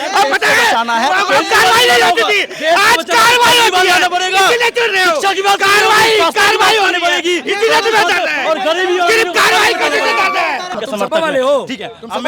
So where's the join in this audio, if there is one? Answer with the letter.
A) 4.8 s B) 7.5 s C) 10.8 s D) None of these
C